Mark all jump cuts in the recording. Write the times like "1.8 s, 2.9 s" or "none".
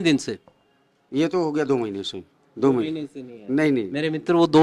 none